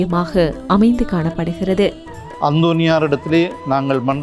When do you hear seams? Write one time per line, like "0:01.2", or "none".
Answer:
0:02.1